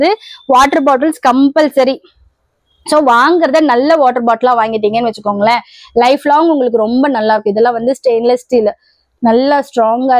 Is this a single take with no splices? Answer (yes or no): yes